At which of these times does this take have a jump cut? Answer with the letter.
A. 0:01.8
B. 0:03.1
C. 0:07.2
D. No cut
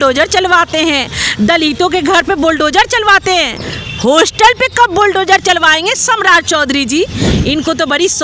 C